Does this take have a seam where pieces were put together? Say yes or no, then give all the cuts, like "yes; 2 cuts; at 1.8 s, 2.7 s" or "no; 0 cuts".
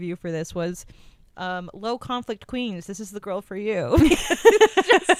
no; 0 cuts